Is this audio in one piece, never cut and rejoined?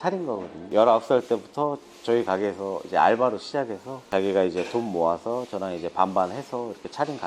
yes; 0 cuts

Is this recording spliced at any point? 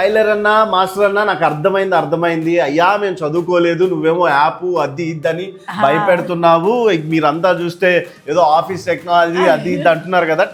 no; 0 cuts

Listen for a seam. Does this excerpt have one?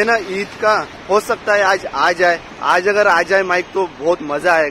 no; 0 cuts

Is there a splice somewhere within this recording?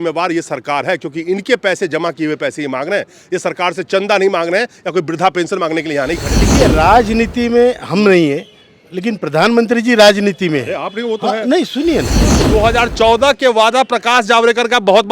yes; 2 cuts; at 6.5 s, 12.4 s

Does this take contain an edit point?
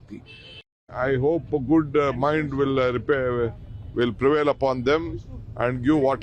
yes; 1 cut; at 0.9 s

